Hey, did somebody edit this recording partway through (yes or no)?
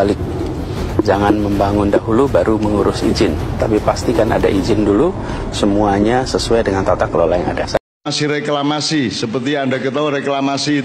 yes